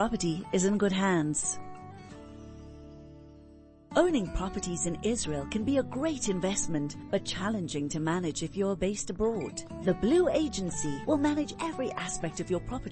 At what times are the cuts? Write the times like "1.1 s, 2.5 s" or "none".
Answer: 1.4 s, 3.8 s